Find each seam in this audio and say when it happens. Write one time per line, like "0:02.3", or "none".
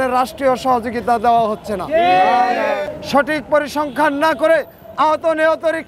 0:02.9